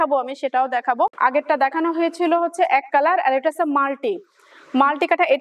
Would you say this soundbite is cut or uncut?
cut